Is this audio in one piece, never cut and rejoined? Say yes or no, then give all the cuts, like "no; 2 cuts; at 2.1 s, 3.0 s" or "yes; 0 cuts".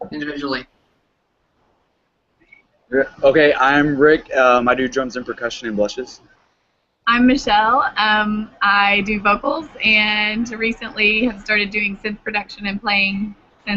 no; 1 cut; at 6.3 s